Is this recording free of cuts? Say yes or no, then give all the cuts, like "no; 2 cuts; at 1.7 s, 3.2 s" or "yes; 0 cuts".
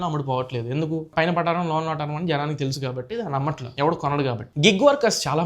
no; 1 cut; at 4.4 s